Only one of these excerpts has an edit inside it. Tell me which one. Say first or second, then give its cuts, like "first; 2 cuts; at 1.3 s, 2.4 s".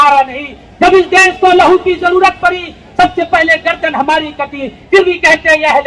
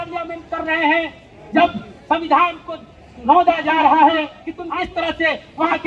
second; 1 cut; at 4.6 s